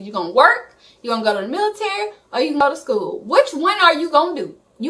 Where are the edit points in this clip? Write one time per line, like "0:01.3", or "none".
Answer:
none